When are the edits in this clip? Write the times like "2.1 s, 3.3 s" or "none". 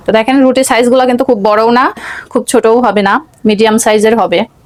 none